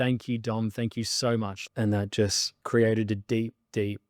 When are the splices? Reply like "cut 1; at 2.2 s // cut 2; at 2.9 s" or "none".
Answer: cut 1; at 1.6 s // cut 2; at 2.5 s